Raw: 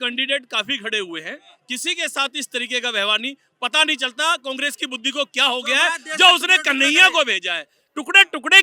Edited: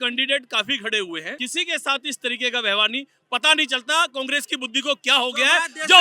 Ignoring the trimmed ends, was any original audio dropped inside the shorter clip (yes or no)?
yes